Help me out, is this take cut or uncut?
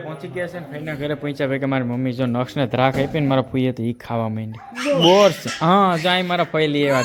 uncut